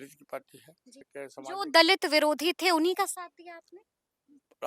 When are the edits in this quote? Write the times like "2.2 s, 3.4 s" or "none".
1.1 s